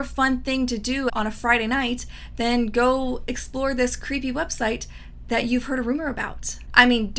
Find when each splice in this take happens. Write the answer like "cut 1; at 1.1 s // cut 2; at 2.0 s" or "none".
cut 1; at 1.1 s